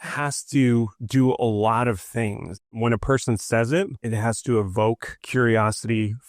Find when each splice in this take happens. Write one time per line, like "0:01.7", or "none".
0:01.0
0:02.7
0:04.0
0:05.1